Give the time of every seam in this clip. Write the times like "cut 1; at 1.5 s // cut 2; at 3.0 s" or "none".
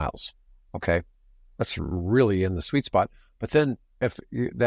none